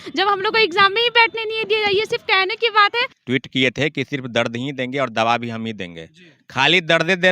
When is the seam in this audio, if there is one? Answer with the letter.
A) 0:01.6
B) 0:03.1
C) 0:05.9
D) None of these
B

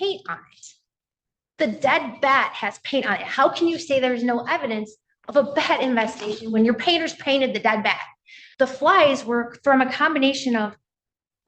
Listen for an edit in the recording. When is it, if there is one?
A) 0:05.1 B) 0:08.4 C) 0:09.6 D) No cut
B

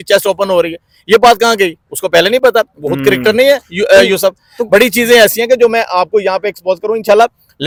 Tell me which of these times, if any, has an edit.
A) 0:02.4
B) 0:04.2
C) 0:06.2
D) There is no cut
D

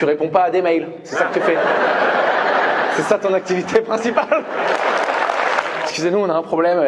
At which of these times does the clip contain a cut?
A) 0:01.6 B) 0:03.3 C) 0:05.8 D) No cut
C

